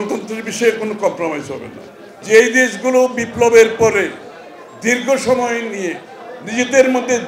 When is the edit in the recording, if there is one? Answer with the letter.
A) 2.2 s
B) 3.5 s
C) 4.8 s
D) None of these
A